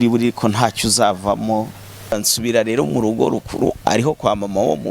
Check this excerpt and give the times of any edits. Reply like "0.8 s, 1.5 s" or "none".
2.2 s